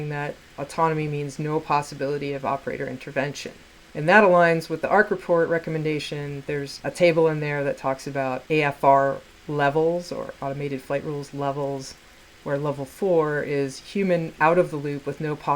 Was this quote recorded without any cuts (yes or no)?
no